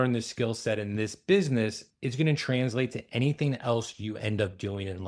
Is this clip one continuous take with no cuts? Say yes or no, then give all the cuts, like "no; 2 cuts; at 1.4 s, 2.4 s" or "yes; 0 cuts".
yes; 0 cuts